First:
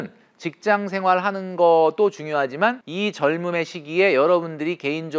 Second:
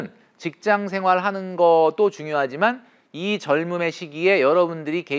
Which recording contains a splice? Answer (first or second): first